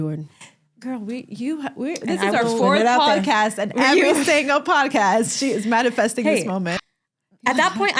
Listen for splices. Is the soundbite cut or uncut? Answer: cut